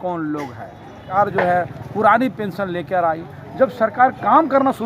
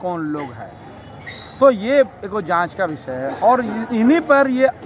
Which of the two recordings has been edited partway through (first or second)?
first